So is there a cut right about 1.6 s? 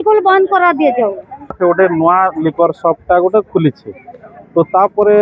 yes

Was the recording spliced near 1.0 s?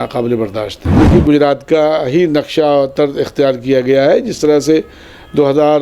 yes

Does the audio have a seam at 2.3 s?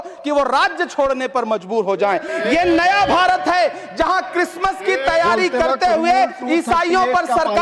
yes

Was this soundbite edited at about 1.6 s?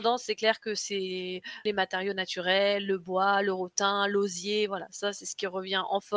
yes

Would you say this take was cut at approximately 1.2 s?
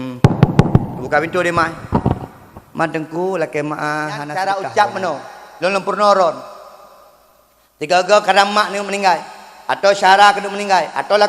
no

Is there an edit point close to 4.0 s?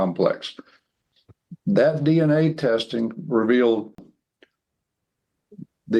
yes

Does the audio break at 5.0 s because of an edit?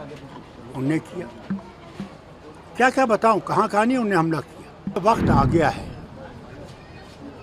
yes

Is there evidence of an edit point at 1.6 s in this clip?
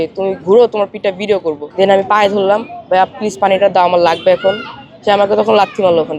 yes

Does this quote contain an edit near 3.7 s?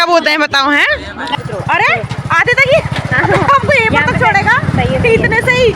no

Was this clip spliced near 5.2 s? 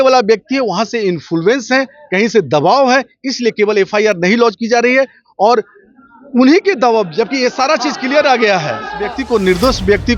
no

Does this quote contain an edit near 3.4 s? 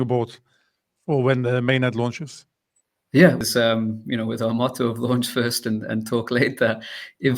yes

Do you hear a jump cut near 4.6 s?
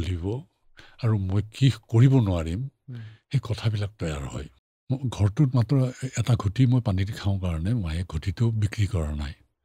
yes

